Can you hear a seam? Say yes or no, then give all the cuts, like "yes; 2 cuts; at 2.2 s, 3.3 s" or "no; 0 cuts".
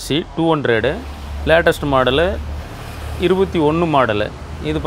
no; 0 cuts